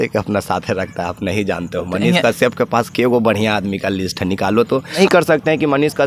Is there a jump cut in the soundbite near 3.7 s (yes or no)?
no